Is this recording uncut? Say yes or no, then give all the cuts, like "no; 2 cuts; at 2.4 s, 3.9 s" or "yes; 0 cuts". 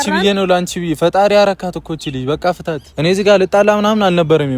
no; 1 cut; at 2.9 s